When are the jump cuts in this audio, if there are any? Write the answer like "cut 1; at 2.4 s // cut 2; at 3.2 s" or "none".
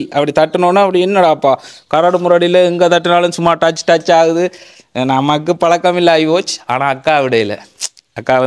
none